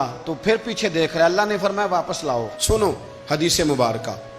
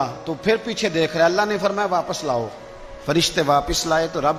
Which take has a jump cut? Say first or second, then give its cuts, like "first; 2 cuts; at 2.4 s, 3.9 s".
first; 1 cut; at 2.5 s